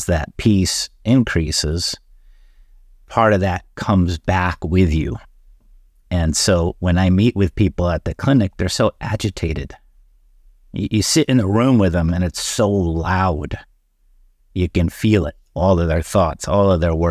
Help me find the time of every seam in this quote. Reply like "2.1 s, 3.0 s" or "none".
none